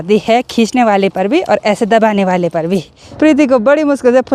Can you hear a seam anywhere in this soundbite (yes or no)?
yes